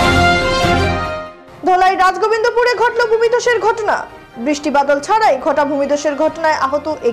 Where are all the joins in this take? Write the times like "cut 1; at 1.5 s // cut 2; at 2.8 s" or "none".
none